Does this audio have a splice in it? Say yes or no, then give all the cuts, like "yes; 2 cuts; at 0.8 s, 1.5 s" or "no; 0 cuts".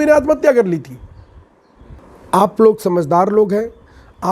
yes; 1 cut; at 2.0 s